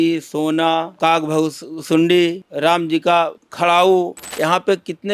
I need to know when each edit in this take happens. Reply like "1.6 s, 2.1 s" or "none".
0.9 s, 2.5 s, 3.4 s, 4.2 s

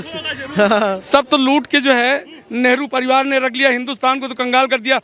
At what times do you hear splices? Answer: 0.9 s

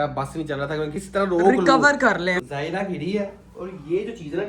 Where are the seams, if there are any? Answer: 1.0 s, 2.4 s

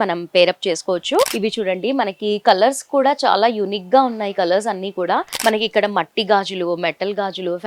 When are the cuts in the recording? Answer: 1.3 s, 5.3 s

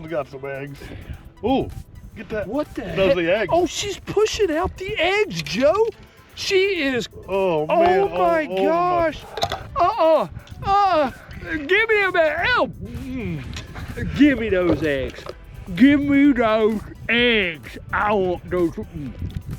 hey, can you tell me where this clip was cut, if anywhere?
none

